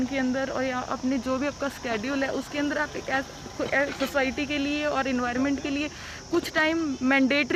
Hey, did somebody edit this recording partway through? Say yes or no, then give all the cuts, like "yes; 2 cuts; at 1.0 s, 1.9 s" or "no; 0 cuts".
no; 0 cuts